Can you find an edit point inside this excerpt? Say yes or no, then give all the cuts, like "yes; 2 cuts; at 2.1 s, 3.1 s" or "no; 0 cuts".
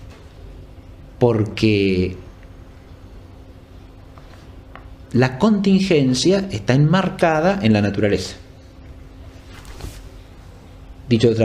no; 0 cuts